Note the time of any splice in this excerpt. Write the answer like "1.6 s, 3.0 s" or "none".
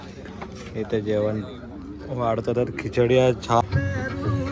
3.6 s